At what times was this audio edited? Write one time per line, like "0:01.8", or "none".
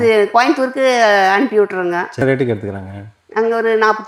0:02.2